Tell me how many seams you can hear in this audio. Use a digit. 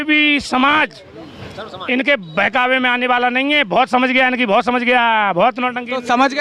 0